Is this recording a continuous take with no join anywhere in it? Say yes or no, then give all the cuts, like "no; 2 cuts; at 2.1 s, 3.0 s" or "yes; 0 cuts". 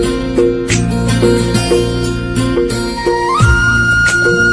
yes; 0 cuts